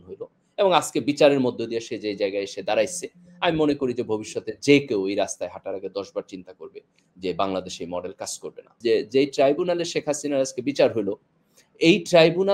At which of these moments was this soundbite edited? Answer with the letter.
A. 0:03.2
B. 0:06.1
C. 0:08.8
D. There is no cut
C